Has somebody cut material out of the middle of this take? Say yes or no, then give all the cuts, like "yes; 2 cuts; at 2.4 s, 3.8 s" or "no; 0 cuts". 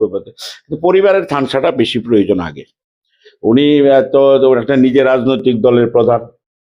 no; 0 cuts